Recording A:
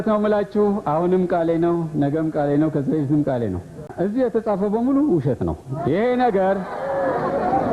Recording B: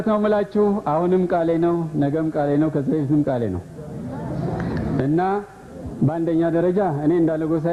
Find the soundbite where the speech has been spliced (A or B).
A